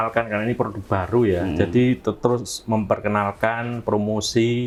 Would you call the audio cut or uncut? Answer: uncut